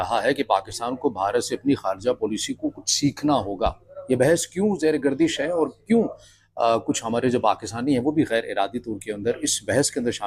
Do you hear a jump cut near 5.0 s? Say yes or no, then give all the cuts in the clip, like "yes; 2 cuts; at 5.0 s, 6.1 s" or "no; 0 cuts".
no; 0 cuts